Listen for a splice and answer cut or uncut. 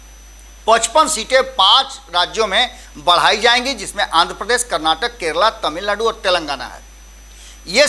uncut